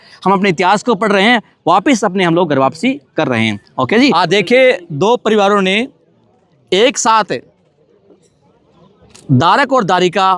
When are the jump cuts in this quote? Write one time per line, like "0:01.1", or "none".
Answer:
0:04.2